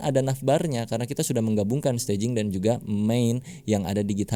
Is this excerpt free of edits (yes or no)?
yes